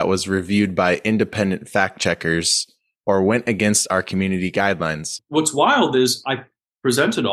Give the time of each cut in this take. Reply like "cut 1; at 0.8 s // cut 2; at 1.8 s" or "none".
cut 1; at 5.2 s